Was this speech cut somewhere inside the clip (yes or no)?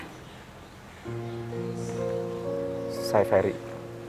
yes